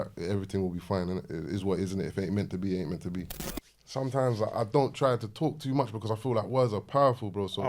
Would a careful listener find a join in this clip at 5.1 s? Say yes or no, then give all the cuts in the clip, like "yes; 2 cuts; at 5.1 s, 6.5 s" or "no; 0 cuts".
no; 1 cut; at 3.3 s